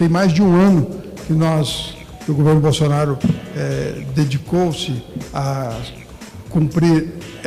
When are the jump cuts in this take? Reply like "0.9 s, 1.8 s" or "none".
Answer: none

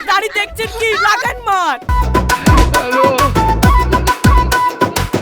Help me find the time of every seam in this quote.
1.9 s

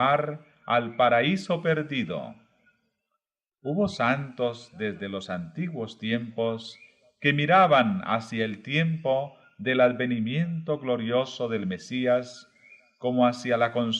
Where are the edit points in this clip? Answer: 1.9 s

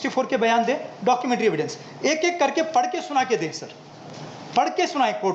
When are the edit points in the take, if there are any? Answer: none

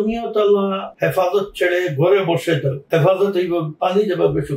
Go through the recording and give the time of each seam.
0.9 s, 2.8 s

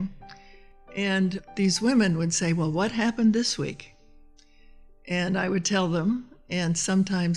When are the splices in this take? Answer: 1.4 s

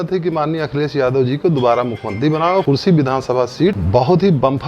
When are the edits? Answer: 2.6 s, 3.8 s

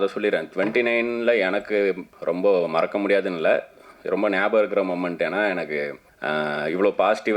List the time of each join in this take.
2.1 s, 6.1 s

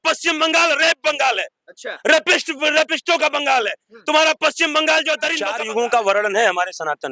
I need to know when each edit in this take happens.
5.6 s

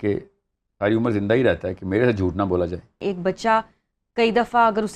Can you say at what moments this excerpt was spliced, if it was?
3.0 s

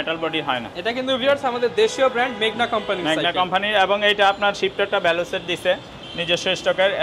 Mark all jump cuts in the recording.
none

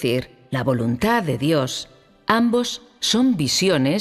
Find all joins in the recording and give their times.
none

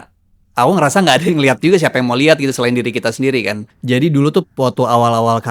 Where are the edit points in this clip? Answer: 3.7 s

